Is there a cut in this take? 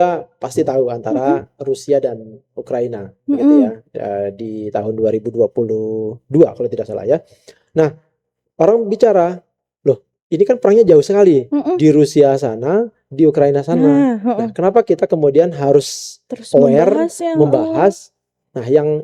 no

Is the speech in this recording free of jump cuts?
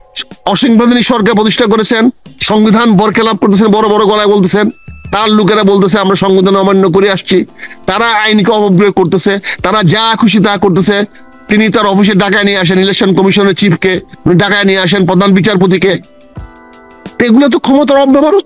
yes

